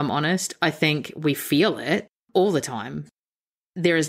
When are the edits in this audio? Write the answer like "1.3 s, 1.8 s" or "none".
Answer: 2.2 s